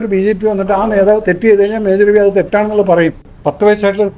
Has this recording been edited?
yes; 1 cut; at 3.3 s

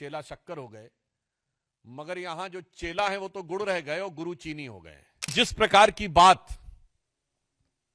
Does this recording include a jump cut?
yes; 1 cut; at 5.3 s

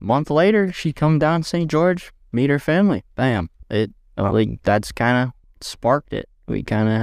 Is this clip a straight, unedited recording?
yes; 0 cuts

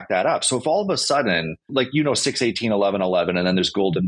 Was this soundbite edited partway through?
yes; 1 cut; at 1.7 s

